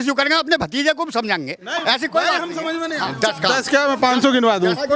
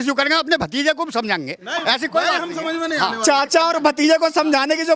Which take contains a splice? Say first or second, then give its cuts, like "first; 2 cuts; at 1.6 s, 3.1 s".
first; 1 cut; at 3.1 s